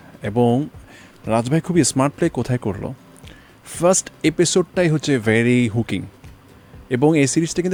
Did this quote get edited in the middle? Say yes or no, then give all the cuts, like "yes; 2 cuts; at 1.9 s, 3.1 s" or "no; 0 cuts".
no; 0 cuts